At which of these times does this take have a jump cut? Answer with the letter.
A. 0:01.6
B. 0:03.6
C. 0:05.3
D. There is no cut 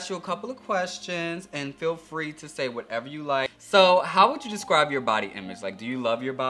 B